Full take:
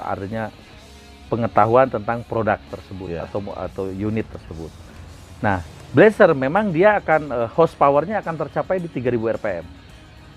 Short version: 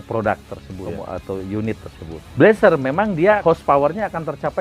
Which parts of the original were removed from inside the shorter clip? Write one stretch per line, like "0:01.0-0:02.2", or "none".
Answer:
0:03.1-0:03.4
0:04.7-0:05.8
0:07.0-0:07.5